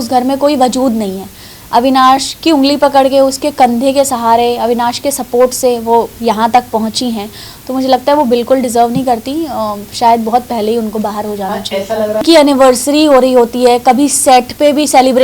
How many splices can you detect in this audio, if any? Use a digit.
1